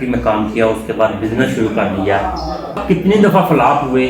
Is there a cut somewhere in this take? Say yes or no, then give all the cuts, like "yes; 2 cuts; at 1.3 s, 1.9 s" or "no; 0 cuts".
yes; 1 cut; at 2.7 s